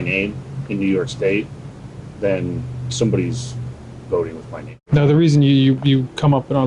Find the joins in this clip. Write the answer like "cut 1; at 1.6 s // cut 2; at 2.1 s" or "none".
cut 1; at 4.7 s